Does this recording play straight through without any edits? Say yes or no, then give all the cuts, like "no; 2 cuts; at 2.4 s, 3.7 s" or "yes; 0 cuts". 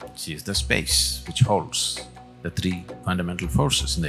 no; 1 cut; at 2.9 s